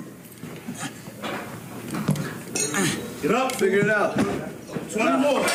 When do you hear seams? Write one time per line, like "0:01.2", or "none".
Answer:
none